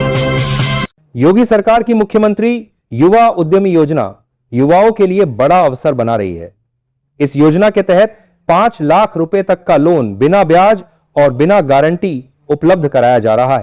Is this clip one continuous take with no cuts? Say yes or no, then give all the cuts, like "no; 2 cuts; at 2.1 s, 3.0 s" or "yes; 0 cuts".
no; 1 cut; at 1.0 s